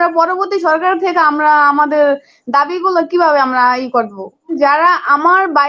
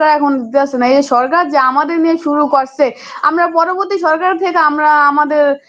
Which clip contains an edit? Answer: first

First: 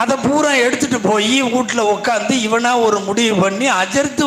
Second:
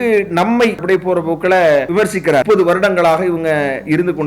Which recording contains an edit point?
second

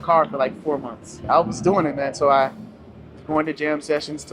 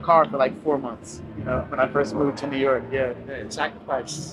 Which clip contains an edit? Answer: first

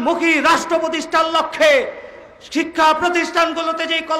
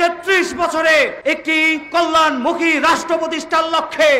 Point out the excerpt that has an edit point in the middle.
second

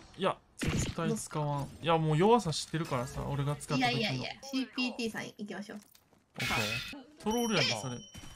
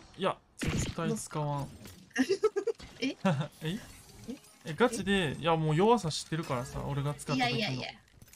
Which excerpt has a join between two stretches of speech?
first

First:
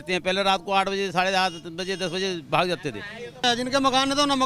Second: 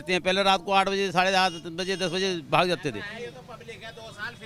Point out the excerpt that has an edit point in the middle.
first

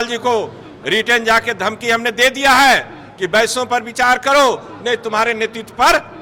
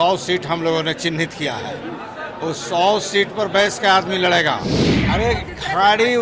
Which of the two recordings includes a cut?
second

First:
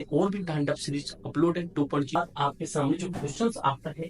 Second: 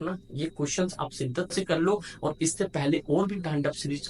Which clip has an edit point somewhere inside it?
first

